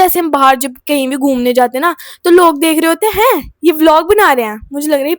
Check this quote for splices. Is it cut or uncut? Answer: uncut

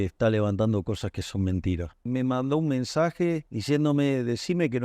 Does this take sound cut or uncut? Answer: cut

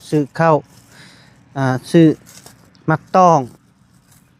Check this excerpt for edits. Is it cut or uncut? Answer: uncut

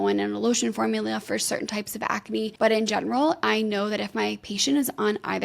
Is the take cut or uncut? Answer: cut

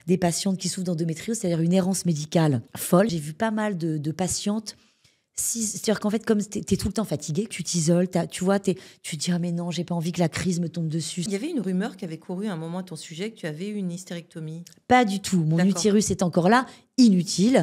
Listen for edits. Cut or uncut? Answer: cut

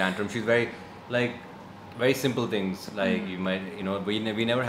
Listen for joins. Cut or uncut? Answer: uncut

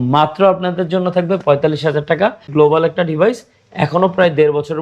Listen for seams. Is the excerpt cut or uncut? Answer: cut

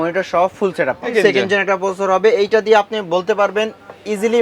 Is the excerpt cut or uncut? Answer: cut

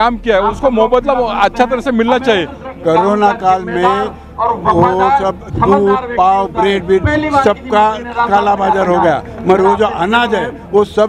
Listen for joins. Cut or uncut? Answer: cut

